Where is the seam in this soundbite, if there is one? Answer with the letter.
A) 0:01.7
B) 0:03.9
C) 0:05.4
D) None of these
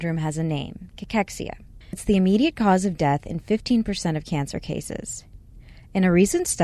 D